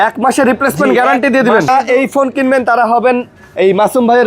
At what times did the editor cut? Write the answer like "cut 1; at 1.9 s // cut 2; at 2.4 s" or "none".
cut 1; at 1.7 s